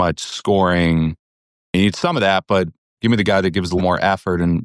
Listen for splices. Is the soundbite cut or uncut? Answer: cut